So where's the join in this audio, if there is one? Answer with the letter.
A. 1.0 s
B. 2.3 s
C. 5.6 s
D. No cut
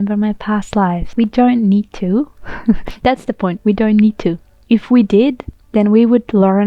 A